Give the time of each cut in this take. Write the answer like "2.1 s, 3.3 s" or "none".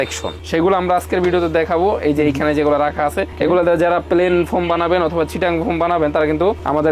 none